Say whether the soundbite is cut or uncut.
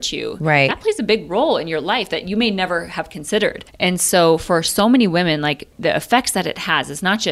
cut